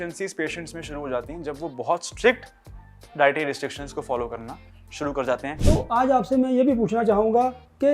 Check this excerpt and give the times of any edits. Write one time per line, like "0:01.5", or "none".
0:05.5